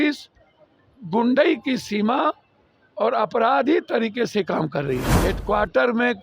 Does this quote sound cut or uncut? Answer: cut